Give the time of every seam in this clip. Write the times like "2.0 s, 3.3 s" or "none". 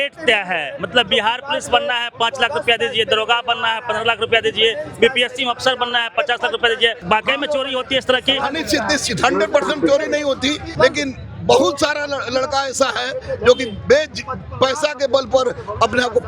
7.0 s, 10.7 s